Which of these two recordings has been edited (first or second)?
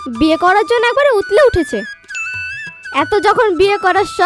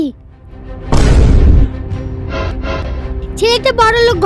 second